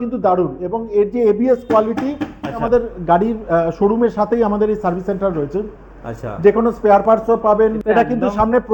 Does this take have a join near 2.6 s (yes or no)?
yes